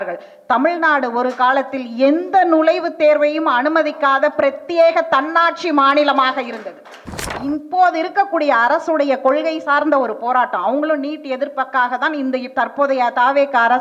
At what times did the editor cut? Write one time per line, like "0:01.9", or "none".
0:07.3